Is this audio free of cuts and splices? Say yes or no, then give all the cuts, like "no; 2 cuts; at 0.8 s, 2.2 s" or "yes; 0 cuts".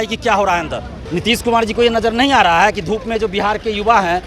no; 1 cut; at 0.9 s